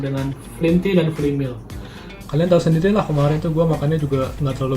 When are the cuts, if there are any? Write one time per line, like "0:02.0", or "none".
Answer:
0:01.7